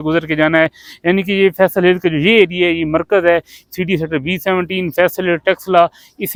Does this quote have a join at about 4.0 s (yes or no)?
no